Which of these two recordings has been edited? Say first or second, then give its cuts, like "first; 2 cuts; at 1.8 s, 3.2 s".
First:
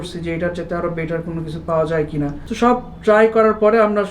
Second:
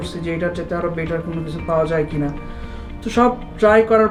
first; 1 cut; at 2.4 s